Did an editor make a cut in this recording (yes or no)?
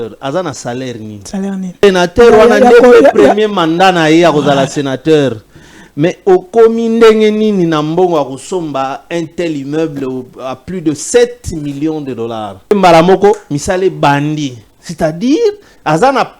yes